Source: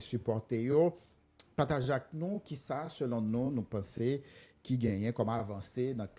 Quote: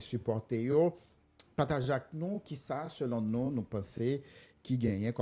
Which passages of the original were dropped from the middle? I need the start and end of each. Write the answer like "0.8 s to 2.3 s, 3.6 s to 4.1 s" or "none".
none